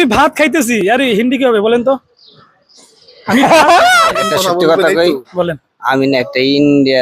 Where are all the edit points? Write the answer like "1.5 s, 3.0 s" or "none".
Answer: 4.1 s